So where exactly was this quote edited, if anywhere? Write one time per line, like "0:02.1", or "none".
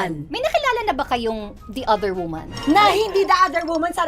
0:02.6